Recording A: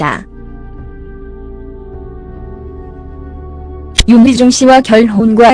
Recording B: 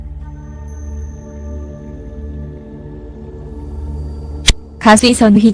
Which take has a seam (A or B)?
A